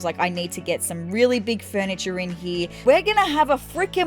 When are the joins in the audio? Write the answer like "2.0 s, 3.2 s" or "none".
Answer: 2.8 s